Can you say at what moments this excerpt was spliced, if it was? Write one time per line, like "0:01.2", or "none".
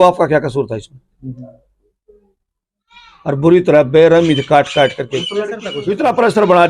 0:05.7

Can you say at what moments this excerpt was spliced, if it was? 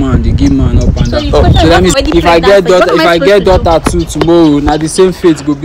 0:01.9

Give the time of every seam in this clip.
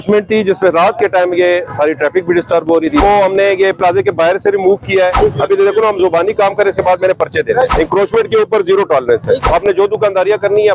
0:03.0
0:05.1
0:07.7
0:09.4

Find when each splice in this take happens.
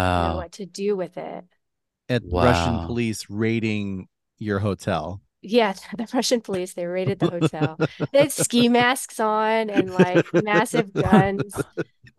none

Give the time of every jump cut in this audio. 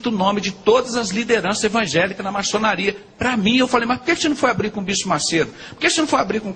none

